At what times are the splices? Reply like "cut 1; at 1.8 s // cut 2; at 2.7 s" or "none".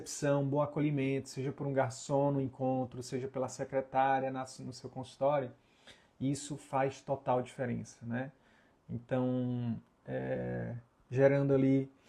none